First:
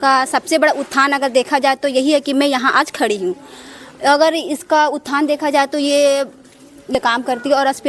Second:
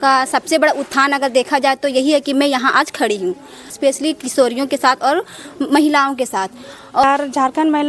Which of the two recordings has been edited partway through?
second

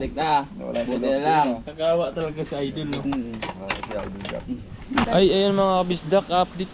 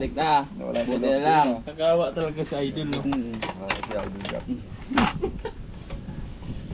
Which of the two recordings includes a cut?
first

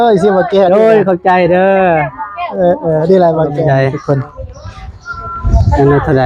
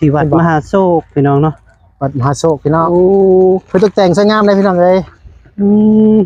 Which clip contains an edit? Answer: first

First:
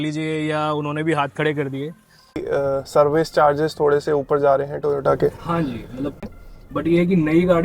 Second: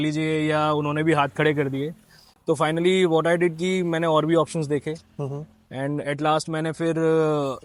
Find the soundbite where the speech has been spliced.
first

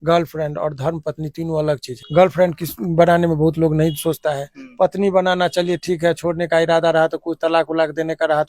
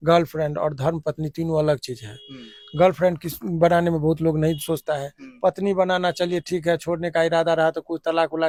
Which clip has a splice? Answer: first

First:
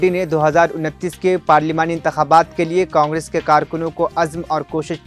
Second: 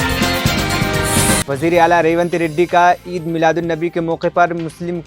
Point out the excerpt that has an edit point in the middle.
second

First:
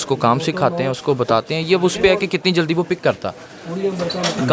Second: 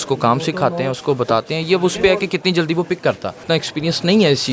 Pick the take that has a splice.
second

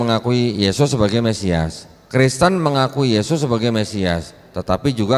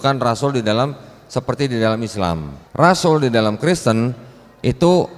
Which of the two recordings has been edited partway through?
second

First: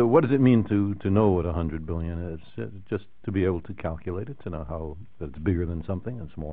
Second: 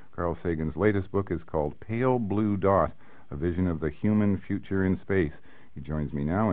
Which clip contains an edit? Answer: first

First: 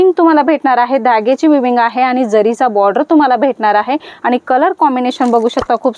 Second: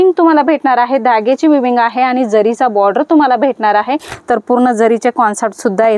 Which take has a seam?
second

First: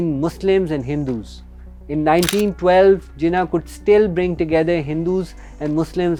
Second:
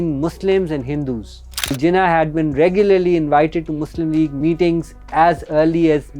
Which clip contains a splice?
second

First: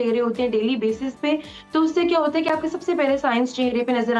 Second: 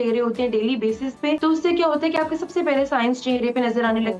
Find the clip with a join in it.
second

